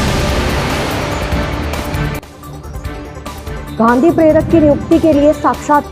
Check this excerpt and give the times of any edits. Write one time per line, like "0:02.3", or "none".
0:03.8

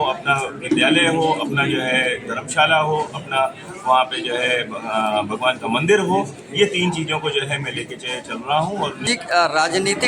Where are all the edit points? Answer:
0:09.1

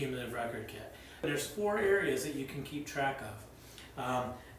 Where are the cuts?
0:01.2

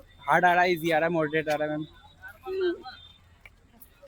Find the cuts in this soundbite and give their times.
none

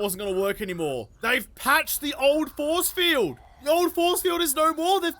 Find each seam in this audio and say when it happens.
0:01.1
0:03.5

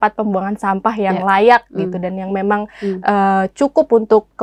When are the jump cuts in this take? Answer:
none

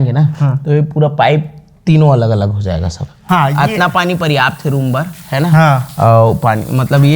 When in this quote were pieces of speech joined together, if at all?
0:03.1

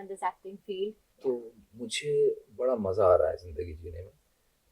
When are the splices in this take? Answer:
0:01.1

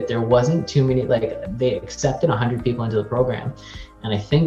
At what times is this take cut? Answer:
none

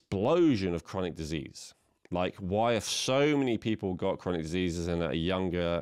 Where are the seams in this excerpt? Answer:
none

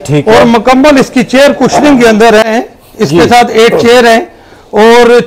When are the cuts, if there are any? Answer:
0:02.5

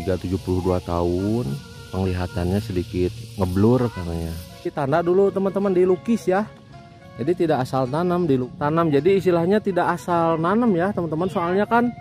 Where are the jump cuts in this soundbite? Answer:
0:04.7
0:08.5

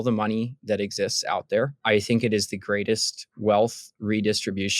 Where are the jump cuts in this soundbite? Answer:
0:01.8

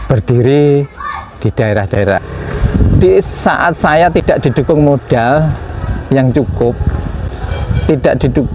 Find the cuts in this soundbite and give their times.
0:02.2

